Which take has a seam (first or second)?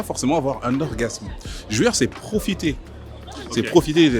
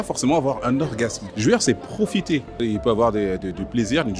second